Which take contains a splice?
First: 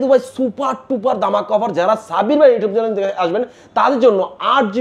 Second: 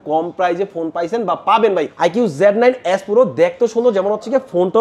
second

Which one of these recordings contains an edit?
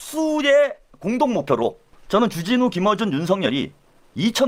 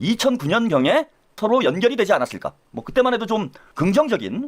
second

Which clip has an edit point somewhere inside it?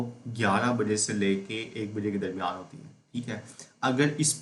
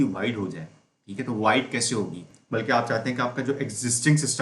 second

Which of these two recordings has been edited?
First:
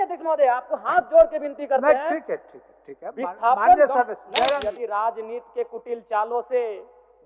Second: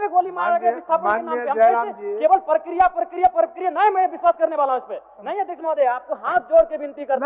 first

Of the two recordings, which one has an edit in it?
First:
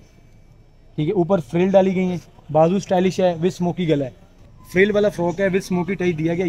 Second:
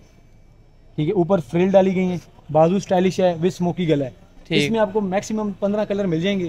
first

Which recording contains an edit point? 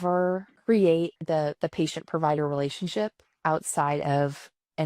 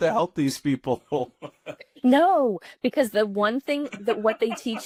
first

